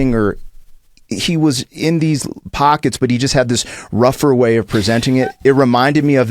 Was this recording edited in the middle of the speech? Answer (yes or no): yes